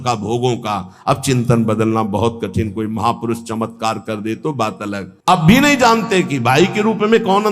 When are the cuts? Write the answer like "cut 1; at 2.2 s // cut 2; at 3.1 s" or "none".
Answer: cut 1; at 5.1 s